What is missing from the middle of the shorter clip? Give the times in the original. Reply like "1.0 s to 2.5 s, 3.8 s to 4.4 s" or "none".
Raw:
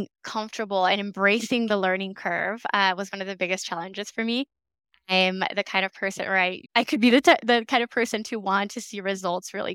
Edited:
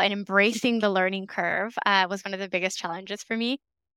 none